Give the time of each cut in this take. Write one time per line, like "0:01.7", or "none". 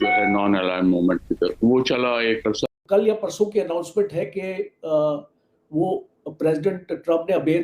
0:02.7

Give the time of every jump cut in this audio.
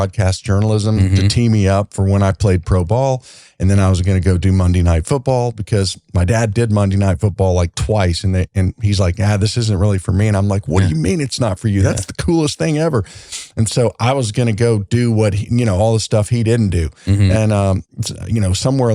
none

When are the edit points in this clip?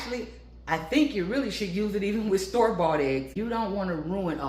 0:03.3

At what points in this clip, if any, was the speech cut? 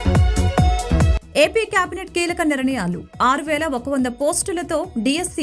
0:01.0

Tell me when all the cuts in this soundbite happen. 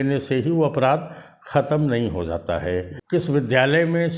0:03.0

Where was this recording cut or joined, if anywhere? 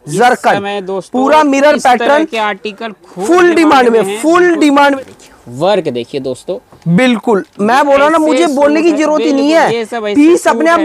0:04.9

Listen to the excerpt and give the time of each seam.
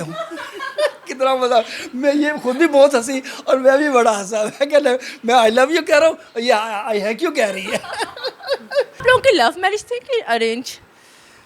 0:09.0

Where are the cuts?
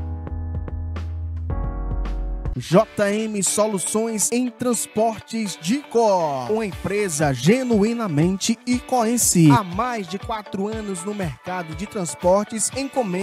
0:02.5

